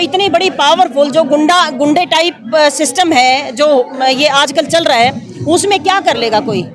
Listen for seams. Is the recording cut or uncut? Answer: uncut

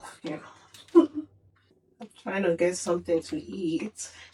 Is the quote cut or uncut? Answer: uncut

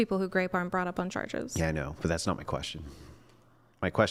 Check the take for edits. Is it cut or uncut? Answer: uncut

